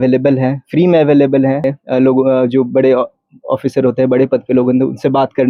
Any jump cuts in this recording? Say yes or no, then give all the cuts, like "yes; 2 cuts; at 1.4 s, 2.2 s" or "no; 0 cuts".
yes; 1 cut; at 1.7 s